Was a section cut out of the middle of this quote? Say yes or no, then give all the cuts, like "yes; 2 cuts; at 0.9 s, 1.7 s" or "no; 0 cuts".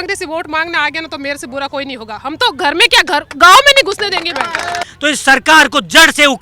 yes; 1 cut; at 4.8 s